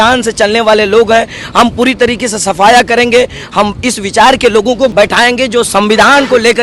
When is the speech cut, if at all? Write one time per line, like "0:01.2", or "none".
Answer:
0:04.9